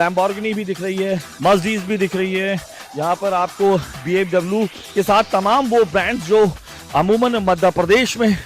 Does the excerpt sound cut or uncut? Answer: cut